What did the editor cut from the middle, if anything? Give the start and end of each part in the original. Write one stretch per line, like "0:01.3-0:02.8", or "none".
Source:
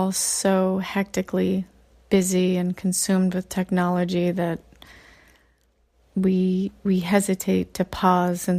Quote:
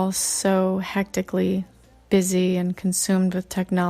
none